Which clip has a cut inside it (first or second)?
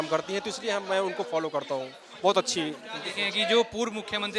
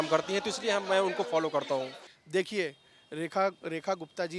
second